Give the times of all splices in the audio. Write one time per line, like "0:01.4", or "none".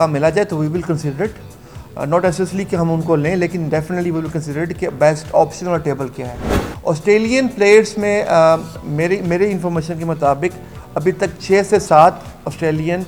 none